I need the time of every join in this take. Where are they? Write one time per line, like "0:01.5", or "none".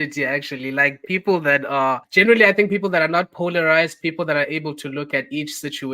0:02.1